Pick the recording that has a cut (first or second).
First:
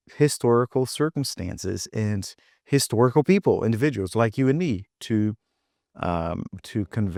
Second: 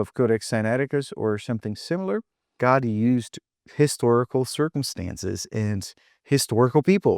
second